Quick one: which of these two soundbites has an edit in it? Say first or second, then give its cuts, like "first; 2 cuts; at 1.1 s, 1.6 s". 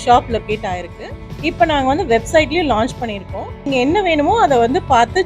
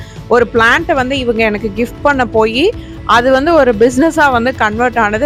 first; 2 cuts; at 1.1 s, 3.7 s